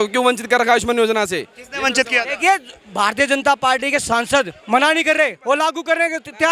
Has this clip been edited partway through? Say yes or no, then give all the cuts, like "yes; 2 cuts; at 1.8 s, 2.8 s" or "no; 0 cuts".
no; 0 cuts